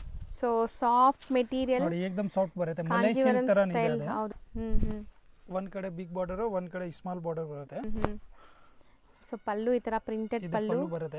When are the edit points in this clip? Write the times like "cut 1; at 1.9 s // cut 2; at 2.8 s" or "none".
cut 1; at 4.4 s // cut 2; at 7.8 s